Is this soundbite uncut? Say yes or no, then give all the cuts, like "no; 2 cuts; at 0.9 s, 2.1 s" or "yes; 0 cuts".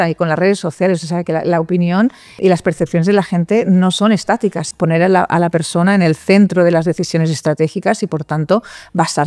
no; 2 cuts; at 2.3 s, 4.6 s